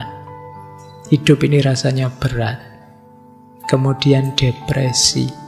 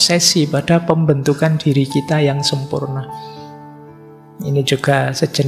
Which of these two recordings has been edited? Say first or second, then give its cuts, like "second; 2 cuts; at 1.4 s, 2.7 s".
second; 2 cuts; at 3.0 s, 4.3 s